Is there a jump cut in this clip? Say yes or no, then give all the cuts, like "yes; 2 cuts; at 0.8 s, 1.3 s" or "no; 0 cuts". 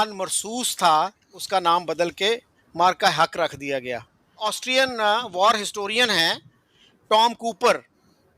yes; 2 cuts; at 1.4 s, 4.3 s